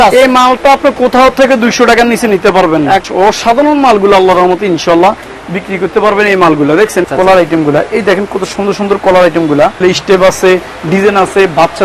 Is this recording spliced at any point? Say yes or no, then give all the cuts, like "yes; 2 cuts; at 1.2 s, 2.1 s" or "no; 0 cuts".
yes; 3 cuts; at 3.1 s, 7.0 s, 9.8 s